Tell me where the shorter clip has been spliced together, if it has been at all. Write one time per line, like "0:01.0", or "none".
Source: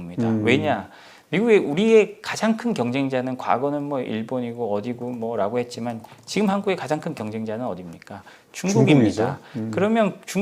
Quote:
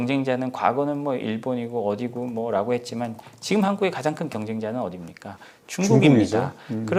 none